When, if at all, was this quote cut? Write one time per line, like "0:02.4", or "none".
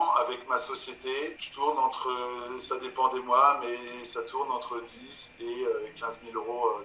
0:01.4